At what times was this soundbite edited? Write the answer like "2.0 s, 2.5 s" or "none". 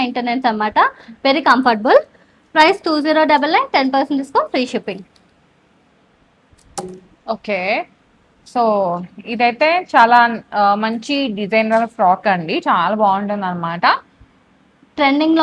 none